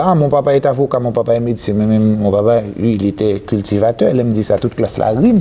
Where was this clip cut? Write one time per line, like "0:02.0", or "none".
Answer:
none

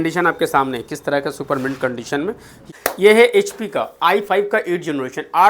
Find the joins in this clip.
0:02.5

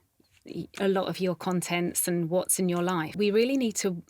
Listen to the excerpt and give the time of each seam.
0:03.1

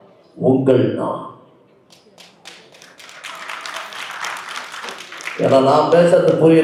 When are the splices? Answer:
none

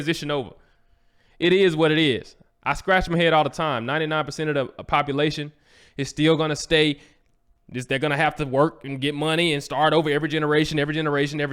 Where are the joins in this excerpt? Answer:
none

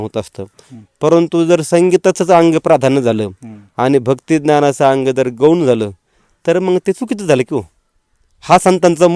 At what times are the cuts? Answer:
none

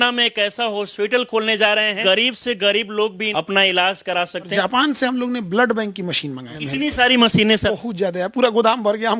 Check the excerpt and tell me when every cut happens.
0:02.0
0:03.2
0:04.5
0:06.5
0:07.7

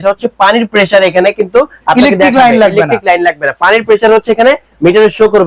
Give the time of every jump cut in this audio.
none

